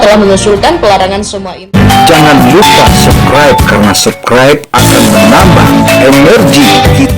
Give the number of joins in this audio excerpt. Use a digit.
1